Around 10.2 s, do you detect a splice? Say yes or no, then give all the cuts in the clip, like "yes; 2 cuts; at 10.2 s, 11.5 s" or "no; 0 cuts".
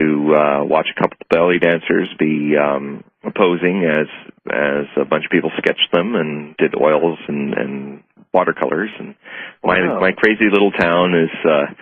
yes; 1 cut; at 10.2 s